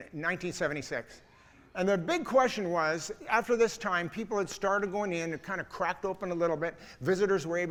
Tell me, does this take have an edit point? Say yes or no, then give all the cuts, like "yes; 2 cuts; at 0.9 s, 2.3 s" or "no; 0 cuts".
no; 0 cuts